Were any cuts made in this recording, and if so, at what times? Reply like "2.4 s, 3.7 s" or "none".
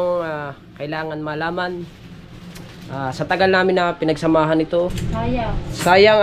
5.0 s